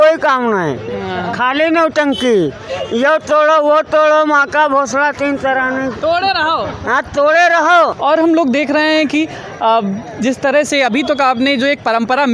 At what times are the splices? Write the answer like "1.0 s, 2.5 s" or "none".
8.0 s